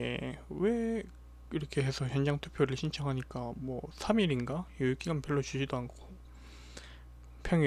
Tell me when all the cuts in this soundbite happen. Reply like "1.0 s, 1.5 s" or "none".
5.7 s